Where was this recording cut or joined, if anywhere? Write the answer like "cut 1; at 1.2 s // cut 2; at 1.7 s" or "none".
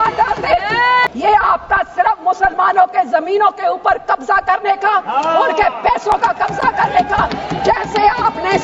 cut 1; at 1.1 s